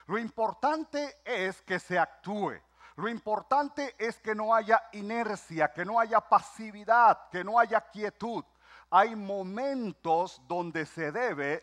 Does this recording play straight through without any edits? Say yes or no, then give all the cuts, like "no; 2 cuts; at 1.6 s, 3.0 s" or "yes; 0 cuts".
yes; 0 cuts